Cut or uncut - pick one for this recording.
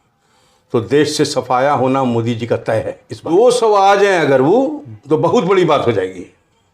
cut